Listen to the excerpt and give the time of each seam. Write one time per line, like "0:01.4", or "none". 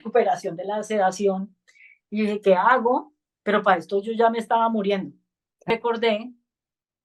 0:05.7